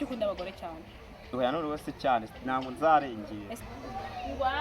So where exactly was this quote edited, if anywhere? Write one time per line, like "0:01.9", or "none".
0:03.5